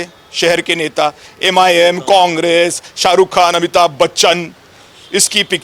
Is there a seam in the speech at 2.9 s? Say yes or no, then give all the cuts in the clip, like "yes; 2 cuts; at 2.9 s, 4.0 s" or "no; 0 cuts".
no; 0 cuts